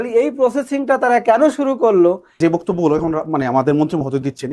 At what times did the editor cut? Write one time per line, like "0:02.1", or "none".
0:02.3